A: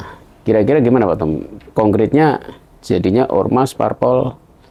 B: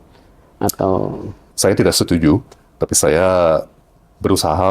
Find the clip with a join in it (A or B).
B